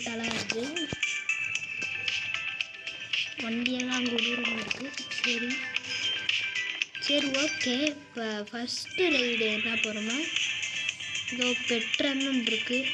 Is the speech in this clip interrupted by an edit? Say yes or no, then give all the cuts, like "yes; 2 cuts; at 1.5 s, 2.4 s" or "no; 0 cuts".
no; 0 cuts